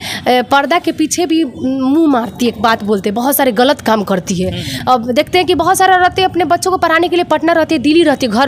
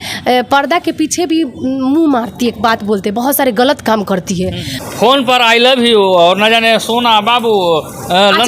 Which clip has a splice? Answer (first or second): second